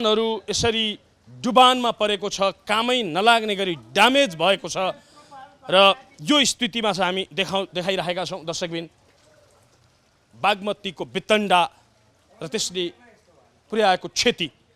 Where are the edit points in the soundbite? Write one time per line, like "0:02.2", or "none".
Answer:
none